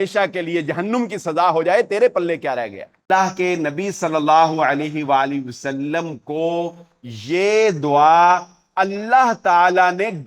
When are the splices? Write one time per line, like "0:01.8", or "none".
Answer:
0:03.0